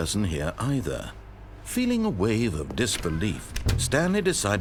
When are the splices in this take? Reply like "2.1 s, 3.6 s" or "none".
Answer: none